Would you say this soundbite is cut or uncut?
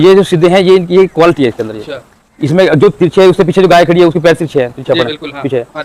uncut